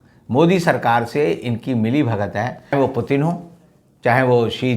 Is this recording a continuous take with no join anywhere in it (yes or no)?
no